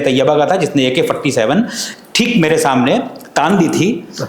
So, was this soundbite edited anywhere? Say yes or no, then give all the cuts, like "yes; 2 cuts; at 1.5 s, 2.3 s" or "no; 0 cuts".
no; 0 cuts